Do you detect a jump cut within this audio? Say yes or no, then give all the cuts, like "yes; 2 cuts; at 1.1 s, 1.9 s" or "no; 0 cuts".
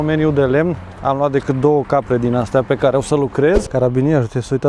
yes; 1 cut; at 3.7 s